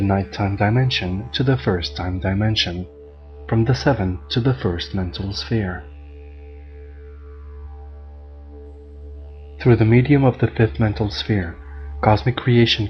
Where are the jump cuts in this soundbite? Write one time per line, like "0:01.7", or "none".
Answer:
0:02.1